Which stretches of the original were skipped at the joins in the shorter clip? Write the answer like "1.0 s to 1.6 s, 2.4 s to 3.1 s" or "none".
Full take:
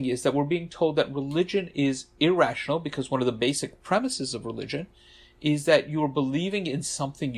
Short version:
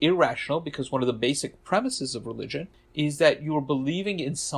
5.0 s to 5.2 s